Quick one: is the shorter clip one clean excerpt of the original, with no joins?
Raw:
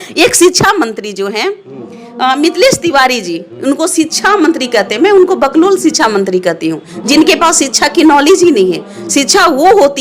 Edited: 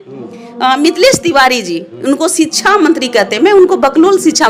yes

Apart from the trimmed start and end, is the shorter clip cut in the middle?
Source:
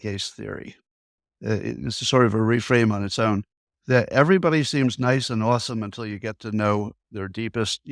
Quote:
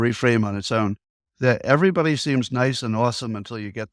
no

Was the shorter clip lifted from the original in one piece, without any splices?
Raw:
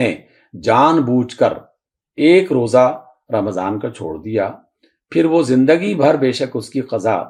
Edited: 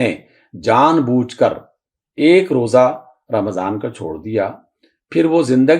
yes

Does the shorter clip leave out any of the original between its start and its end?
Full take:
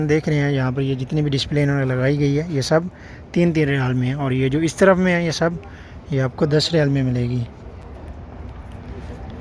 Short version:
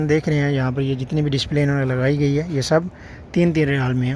no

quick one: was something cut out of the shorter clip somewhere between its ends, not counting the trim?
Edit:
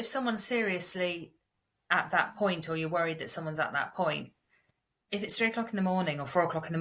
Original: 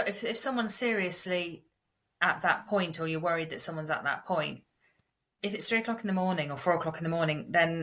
no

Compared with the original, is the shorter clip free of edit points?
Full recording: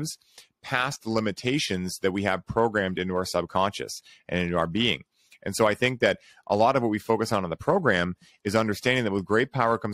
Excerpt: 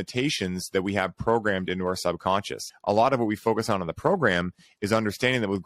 no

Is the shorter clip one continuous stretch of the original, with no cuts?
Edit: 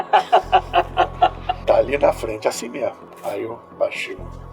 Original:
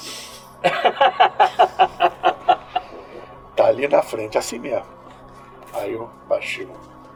no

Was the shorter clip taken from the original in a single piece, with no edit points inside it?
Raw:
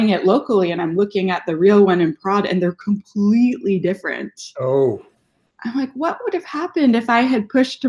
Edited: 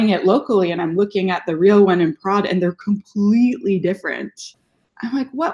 no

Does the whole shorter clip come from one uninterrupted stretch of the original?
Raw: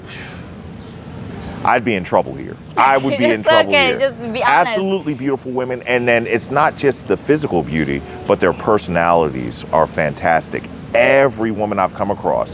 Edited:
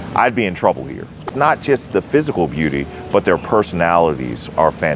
no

